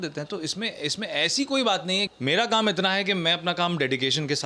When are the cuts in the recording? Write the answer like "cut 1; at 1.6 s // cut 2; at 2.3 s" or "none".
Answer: cut 1; at 2.1 s